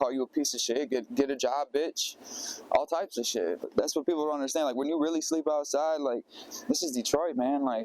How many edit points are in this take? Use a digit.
1